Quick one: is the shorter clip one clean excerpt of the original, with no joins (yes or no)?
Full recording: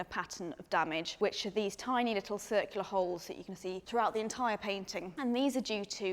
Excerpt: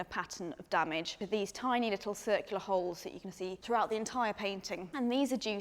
no